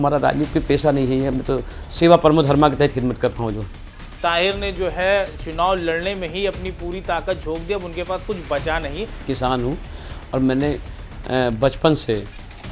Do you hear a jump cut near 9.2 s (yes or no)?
yes